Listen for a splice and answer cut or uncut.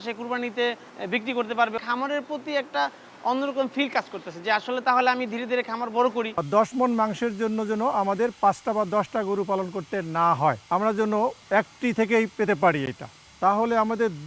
cut